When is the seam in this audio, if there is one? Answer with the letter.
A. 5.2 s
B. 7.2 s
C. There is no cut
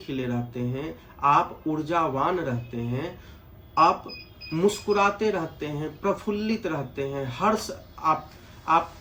C